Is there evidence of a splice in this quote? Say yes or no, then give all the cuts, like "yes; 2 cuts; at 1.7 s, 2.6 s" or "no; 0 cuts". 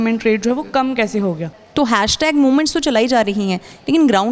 yes; 1 cut; at 1.6 s